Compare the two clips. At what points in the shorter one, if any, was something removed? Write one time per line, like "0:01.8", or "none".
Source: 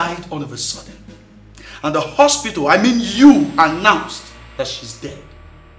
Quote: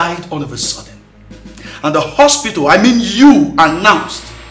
none